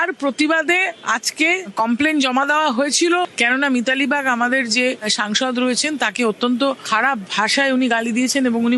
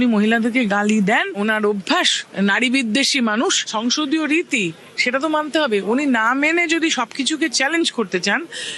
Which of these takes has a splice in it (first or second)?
first